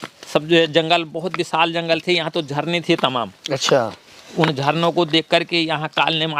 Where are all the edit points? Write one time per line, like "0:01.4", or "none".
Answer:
none